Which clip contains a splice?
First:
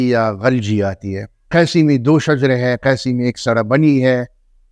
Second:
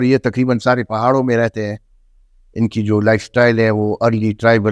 first; 1 cut; at 1.5 s

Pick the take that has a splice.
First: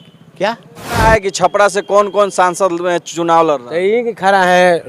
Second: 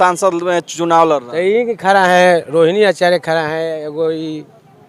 first; 1 cut; at 1.0 s

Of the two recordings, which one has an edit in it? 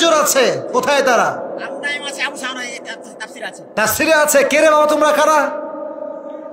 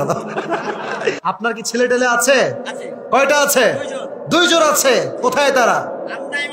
second; 1 cut; at 1.2 s

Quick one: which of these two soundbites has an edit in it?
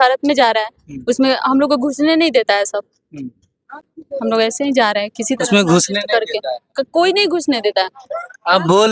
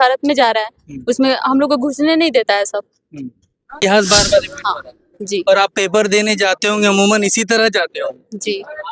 second; 1 cut; at 3.8 s

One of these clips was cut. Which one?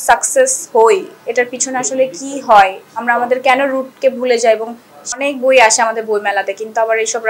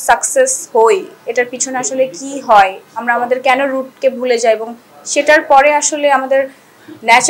first; 1 cut; at 5.1 s

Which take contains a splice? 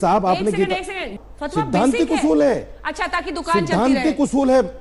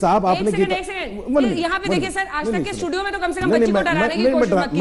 first; 1 cut; at 1.2 s

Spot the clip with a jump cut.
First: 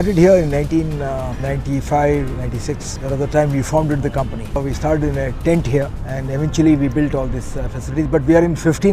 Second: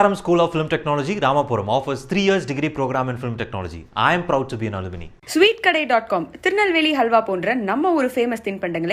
first; 3 cuts; at 2.4 s, 4.6 s, 6.1 s

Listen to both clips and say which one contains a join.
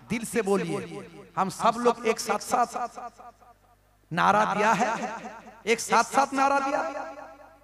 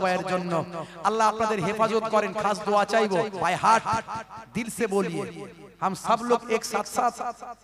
second; 1 cut; at 3.3 s

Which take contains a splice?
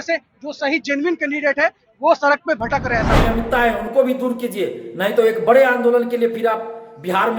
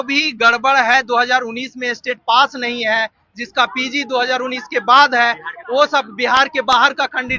first; 1 cut; at 3.1 s

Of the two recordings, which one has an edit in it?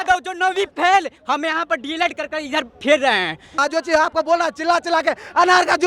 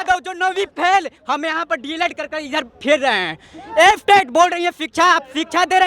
first; 1 cut; at 3.6 s

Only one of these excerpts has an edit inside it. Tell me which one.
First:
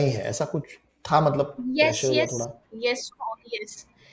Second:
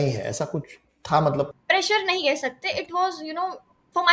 second; 1 cut; at 1.6 s

